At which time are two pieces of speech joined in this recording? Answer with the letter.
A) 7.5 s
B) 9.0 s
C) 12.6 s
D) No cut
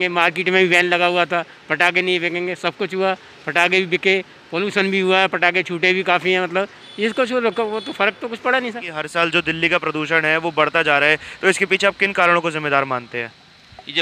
B